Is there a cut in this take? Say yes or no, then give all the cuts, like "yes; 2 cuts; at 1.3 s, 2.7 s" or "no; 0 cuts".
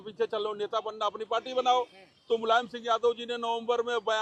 no; 0 cuts